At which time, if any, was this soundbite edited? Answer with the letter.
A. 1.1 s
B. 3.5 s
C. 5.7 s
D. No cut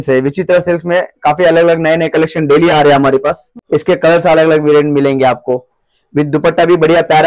B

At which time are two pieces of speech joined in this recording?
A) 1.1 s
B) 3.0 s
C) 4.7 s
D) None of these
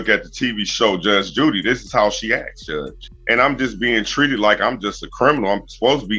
B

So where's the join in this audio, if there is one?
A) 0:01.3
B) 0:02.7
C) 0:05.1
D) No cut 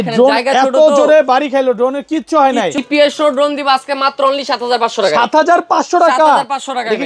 B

